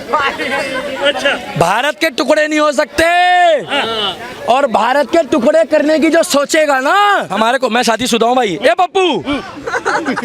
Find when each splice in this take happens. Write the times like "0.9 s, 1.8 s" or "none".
7.3 s